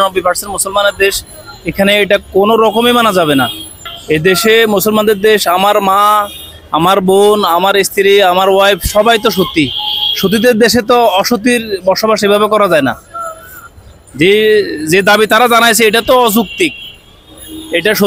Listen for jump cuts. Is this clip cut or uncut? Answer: uncut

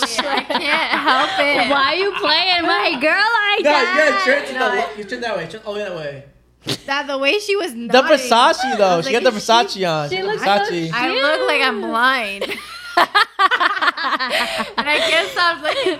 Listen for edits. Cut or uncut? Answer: uncut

